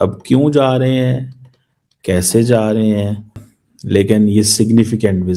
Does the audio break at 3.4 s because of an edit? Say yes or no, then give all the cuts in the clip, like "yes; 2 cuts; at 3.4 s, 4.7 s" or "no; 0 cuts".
yes; 1 cut; at 3.4 s